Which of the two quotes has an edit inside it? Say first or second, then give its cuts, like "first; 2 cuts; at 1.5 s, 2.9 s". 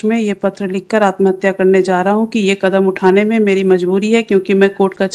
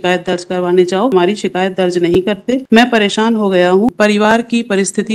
second; 3 cuts; at 1.1 s, 2.6 s, 3.9 s